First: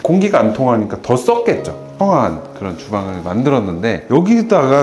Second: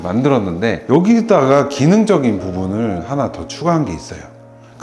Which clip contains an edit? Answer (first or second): first